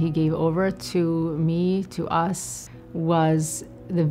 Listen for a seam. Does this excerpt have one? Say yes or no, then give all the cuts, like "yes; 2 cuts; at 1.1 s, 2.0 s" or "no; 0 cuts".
no; 0 cuts